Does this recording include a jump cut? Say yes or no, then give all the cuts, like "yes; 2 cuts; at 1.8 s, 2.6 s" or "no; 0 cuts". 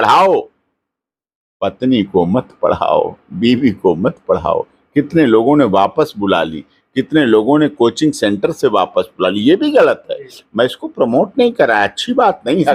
no; 0 cuts